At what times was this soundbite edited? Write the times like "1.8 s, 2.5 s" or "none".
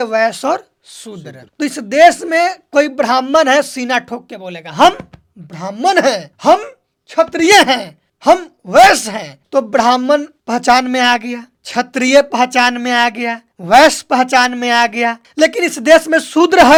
none